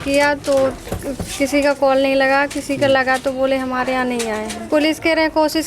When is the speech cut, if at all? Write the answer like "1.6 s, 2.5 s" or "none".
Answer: 4.6 s